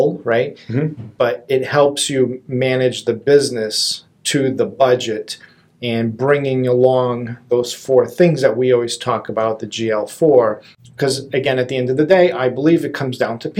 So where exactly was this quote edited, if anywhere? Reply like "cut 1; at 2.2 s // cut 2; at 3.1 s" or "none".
cut 1; at 10.7 s